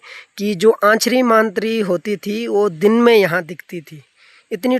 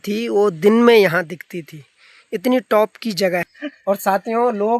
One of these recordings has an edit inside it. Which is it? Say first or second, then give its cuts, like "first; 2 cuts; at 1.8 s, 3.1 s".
second; 1 cut; at 3.5 s